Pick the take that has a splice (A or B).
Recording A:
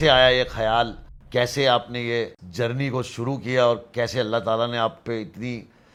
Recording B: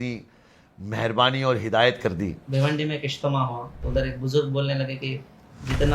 B